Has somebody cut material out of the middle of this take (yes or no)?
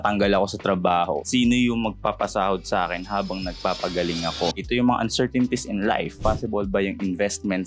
yes